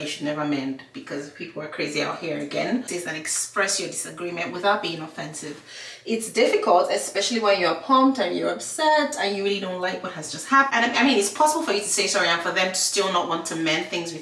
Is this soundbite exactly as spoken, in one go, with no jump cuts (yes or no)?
no